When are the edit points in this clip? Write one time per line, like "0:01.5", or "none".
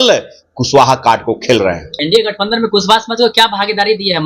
0:01.9